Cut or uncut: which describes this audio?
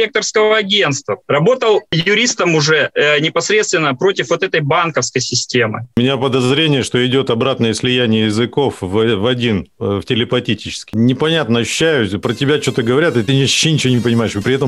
cut